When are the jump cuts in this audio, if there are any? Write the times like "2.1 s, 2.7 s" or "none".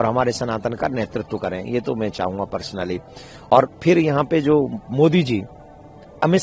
none